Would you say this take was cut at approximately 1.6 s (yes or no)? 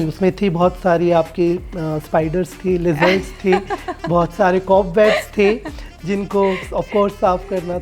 no